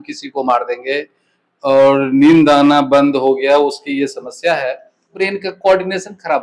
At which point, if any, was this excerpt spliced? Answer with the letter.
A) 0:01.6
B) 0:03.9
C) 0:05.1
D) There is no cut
C